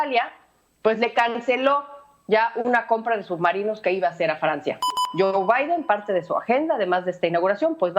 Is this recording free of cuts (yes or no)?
no